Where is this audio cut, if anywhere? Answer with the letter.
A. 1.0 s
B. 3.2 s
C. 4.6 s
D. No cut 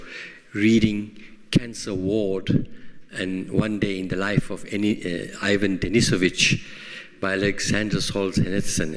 C